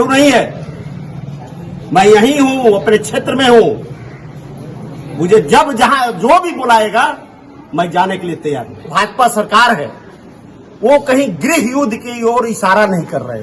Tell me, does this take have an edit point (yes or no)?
yes